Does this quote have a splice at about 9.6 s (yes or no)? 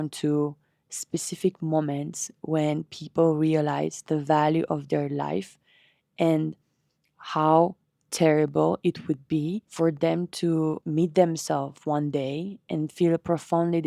yes